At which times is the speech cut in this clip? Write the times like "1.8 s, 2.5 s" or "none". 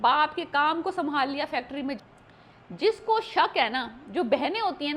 2.0 s